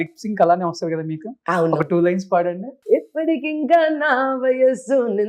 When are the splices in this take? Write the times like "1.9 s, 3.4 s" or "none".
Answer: 2.7 s